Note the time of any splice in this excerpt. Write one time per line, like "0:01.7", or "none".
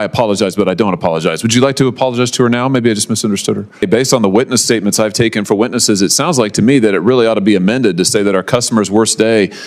0:03.9